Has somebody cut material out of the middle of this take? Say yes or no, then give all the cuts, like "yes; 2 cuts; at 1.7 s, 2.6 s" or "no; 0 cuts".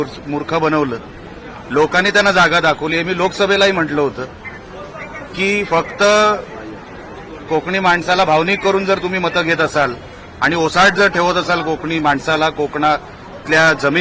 no; 0 cuts